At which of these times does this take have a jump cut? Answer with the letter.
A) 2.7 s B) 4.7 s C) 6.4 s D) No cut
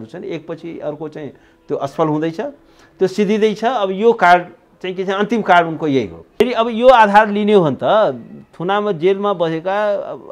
C